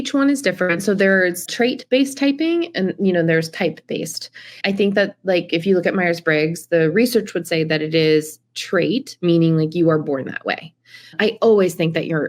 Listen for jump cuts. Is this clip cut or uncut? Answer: cut